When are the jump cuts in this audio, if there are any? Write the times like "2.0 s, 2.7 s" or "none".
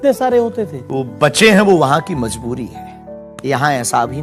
3.2 s